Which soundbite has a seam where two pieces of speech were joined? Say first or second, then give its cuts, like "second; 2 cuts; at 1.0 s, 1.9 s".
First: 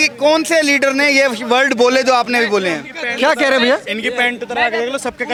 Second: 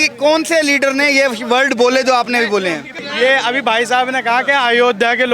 second; 1 cut; at 3.0 s